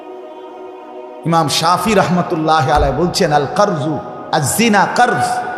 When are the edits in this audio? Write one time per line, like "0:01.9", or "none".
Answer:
0:01.2